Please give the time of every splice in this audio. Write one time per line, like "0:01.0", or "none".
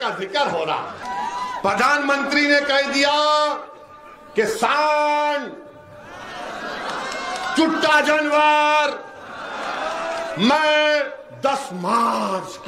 0:01.0